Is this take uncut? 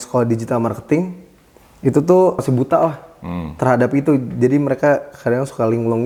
yes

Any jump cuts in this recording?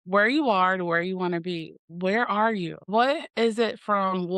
yes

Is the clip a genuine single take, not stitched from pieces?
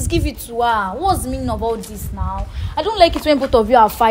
yes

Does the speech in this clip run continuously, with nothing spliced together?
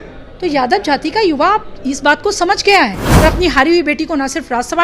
no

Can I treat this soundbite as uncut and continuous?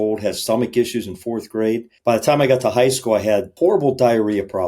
no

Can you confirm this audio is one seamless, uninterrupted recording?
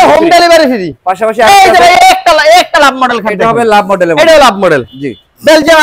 yes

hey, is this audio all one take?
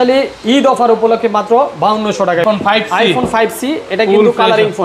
no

